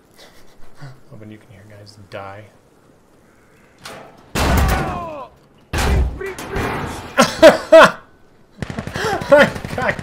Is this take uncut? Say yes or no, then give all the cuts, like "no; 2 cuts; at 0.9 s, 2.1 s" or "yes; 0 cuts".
yes; 0 cuts